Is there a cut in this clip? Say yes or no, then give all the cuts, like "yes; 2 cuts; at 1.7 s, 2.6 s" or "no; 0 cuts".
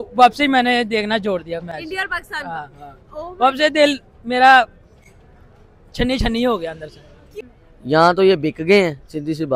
no; 0 cuts